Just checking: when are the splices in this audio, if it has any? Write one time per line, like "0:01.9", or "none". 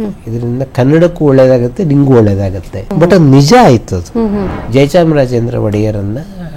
0:02.9
0:04.5